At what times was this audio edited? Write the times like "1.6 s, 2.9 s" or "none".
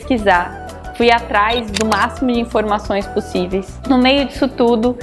none